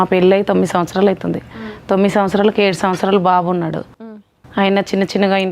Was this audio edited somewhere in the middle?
no; 0 cuts

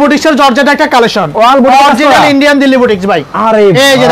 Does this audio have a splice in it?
no; 0 cuts

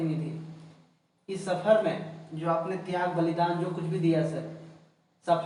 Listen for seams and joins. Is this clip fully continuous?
yes; 0 cuts

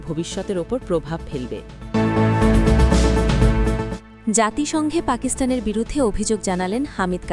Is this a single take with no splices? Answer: no; 2 cuts; at 1.7 s, 4.1 s

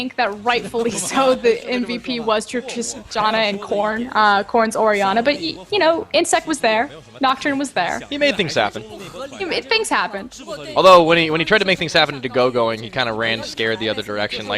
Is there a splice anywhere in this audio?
yes; 1 cut; at 5.5 s

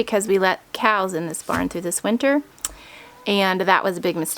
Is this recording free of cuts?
yes; 0 cuts

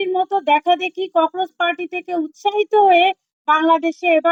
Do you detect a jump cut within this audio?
no; 0 cuts

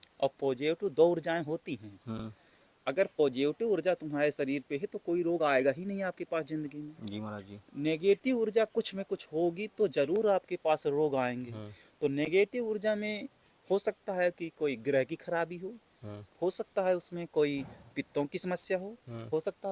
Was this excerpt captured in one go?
yes; 0 cuts

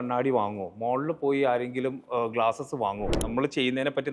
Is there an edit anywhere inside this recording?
yes; 1 cut; at 3.1 s

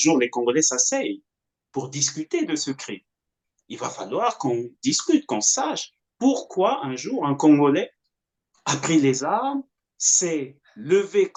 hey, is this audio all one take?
yes; 0 cuts

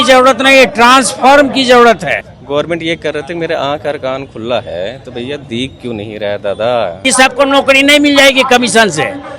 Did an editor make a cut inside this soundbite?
yes; 2 cuts; at 2.2 s, 7.1 s

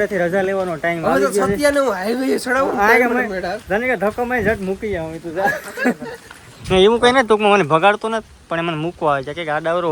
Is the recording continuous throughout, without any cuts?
yes; 0 cuts

